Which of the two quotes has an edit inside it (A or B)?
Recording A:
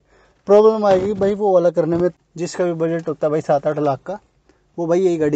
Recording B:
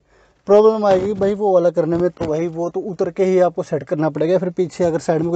A